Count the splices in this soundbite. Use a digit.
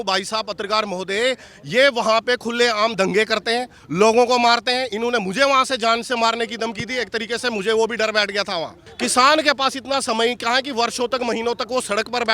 1